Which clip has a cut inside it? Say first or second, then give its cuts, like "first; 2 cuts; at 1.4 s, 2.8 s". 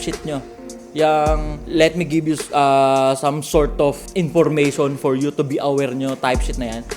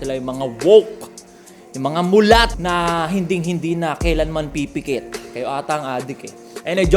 first; 2 cuts; at 1.5 s, 4.0 s